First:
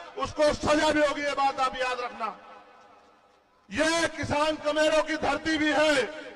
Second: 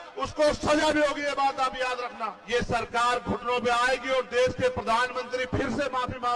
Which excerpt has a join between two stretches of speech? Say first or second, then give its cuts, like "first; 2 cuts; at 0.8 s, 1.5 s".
second; 1 cut; at 2.4 s